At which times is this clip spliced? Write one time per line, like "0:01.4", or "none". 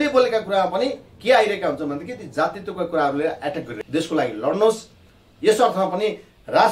0:03.7